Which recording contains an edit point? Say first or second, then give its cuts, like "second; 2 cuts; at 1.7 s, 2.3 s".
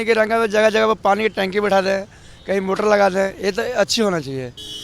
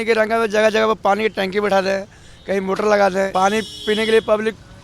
second; 1 cut; at 3.3 s